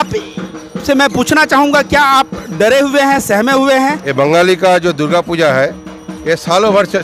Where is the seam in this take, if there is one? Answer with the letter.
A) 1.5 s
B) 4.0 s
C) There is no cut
B